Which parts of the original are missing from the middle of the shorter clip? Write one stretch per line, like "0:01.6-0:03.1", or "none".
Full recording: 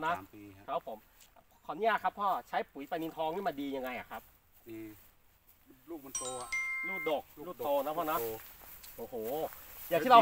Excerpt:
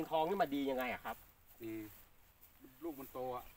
none